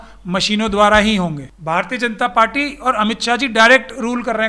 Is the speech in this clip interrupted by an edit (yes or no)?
yes